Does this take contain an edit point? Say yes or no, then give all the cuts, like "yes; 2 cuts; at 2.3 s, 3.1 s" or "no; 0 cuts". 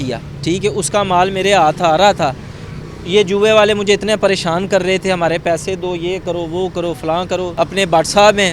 yes; 1 cut; at 7.5 s